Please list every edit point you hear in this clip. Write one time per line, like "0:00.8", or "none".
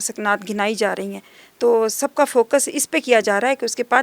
none